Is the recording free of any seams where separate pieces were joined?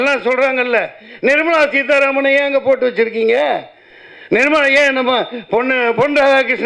yes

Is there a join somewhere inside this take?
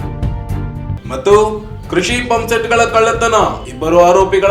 no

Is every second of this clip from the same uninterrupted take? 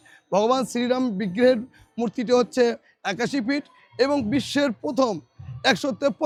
yes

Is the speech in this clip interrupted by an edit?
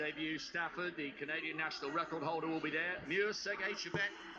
no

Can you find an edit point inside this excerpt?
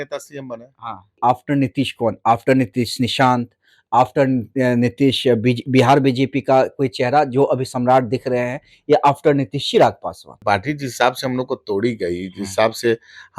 yes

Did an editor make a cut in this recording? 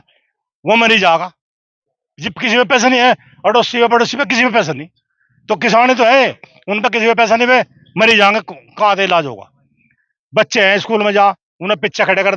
no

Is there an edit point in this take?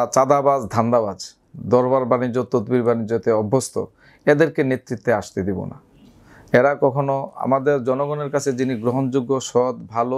no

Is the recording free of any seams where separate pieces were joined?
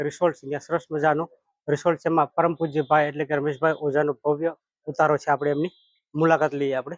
yes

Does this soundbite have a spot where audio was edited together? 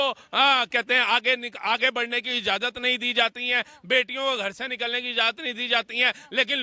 no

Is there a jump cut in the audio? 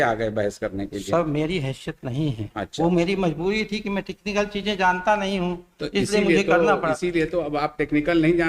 no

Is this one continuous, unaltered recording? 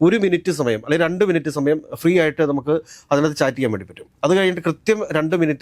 yes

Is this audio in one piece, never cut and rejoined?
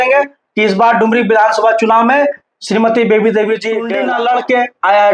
no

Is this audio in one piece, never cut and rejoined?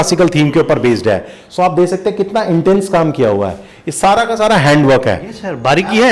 yes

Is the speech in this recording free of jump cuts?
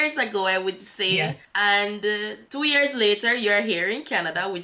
no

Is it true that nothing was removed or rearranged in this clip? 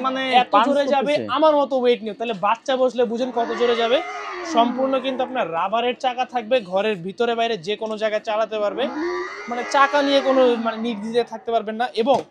yes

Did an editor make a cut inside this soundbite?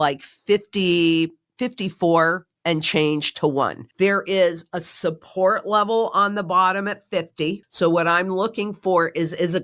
yes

